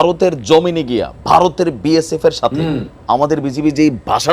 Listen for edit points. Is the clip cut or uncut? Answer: uncut